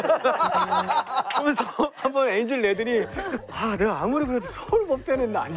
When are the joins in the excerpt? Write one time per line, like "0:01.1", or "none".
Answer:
0:03.4